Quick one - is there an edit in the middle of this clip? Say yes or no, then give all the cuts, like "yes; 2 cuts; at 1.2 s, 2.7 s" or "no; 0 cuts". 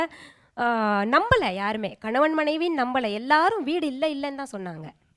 no; 0 cuts